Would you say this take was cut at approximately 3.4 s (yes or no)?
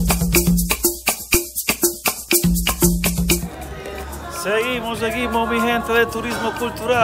yes